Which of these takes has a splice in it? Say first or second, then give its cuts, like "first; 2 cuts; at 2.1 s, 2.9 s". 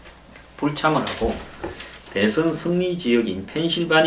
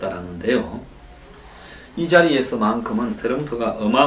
second; 1 cut; at 1.6 s